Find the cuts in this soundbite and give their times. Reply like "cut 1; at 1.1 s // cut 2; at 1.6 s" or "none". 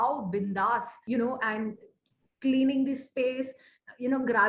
cut 1; at 0.9 s